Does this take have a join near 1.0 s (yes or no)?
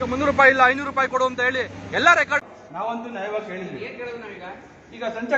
no